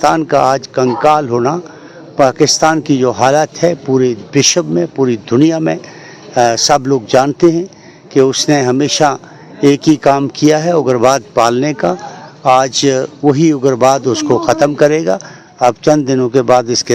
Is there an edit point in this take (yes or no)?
no